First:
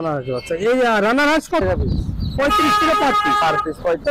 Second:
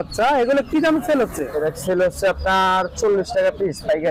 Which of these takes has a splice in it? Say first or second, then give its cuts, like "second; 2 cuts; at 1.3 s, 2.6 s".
first; 1 cut; at 1.6 s